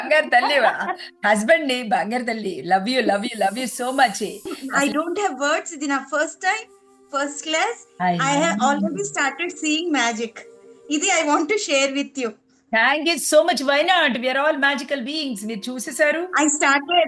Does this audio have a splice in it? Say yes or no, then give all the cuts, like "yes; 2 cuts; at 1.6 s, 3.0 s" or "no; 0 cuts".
yes; 1 cut; at 4.6 s